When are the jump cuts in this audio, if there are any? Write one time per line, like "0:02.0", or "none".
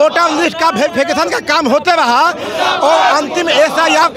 none